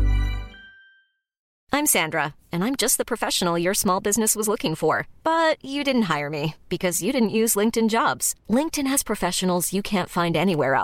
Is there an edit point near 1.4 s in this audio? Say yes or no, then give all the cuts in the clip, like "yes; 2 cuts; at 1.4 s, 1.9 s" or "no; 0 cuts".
yes; 1 cut; at 1.4 s